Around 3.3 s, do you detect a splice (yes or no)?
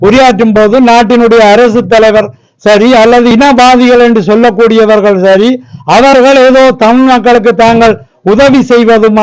yes